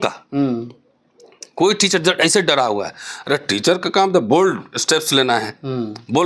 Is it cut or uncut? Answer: uncut